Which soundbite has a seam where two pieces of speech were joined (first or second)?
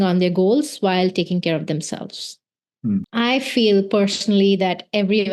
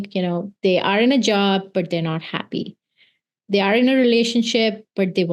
first